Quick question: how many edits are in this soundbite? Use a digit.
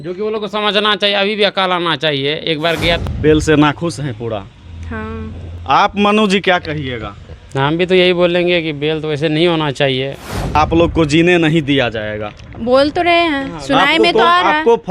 2